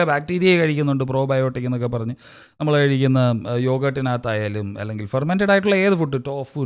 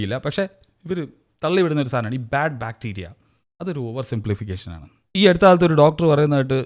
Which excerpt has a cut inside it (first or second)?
second